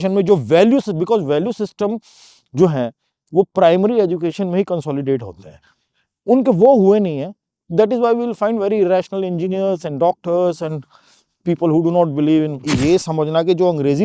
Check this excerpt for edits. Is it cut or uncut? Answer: cut